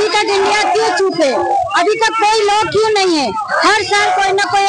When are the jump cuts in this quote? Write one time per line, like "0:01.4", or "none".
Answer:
none